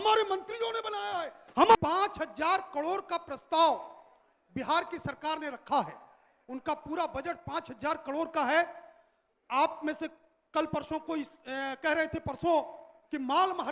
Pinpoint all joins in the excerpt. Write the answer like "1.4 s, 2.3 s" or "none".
1.8 s

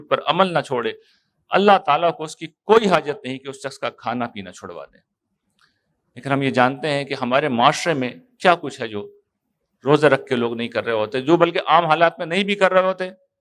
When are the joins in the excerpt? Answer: none

